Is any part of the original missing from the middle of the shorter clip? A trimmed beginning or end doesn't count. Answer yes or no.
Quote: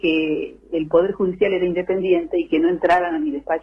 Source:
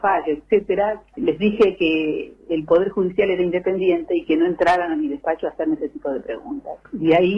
no